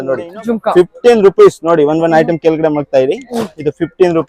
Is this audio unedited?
yes; 0 cuts

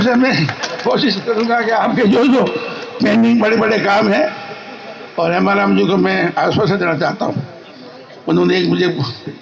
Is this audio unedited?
yes; 0 cuts

